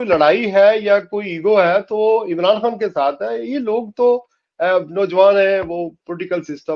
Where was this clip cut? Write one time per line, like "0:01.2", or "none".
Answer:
none